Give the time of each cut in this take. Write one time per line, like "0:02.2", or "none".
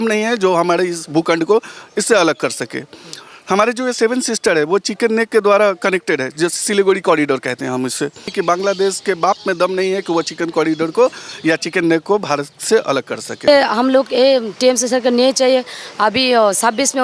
0:08.3
0:13.5